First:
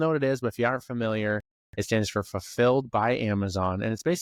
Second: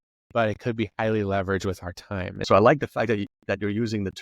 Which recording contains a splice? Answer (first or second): second